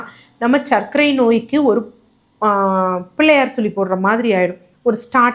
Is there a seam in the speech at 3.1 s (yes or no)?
no